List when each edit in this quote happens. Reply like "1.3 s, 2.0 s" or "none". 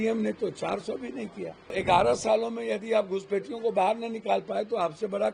1.7 s